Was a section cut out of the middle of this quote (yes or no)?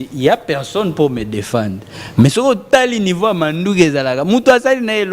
no